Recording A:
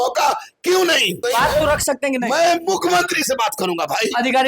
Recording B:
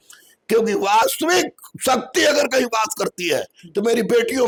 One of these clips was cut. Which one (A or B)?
A